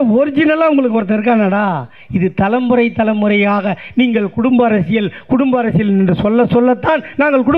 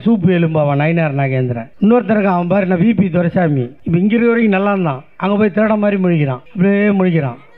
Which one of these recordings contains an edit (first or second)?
second